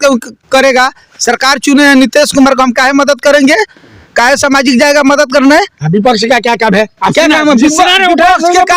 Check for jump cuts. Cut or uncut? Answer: uncut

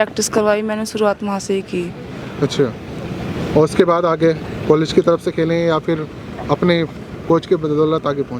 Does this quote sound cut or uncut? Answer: uncut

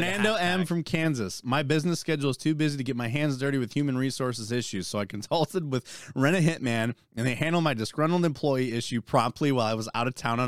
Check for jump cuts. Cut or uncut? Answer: uncut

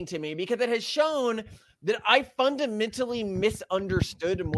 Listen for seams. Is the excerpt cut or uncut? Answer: uncut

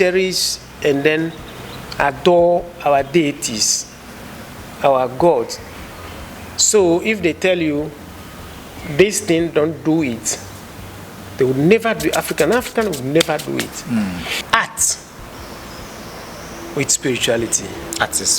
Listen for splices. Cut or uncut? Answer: cut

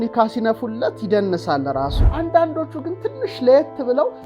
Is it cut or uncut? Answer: cut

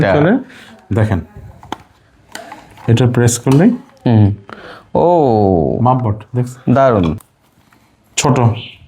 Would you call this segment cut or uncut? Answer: cut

